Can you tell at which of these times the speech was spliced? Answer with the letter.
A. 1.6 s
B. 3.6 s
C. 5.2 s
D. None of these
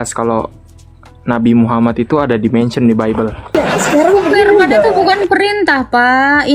B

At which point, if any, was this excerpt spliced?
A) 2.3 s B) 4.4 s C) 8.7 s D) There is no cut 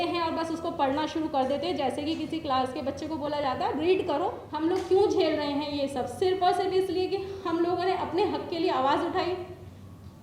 B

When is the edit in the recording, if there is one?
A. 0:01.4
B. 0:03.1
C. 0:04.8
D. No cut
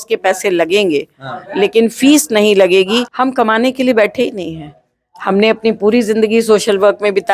B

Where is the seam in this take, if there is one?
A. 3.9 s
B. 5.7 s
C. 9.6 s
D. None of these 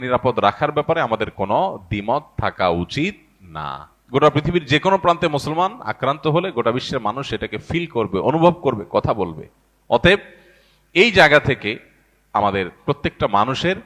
A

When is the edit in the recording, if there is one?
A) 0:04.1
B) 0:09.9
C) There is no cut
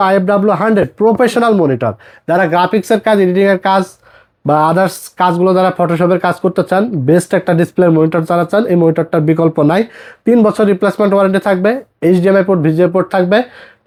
C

